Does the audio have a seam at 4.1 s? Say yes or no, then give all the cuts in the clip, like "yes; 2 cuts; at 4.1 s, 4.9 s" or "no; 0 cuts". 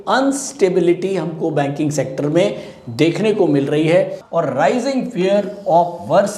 yes; 1 cut; at 4.1 s